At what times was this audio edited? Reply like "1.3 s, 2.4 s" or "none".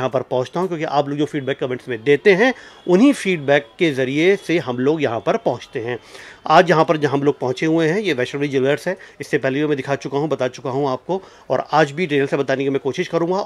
none